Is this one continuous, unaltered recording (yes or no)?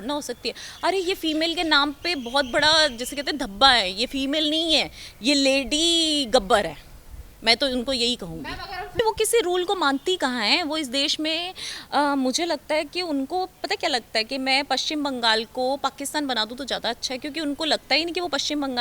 no